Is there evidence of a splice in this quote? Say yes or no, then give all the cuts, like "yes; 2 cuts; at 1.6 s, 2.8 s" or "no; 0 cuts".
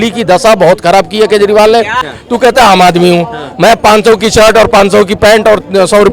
yes; 1 cut; at 2.0 s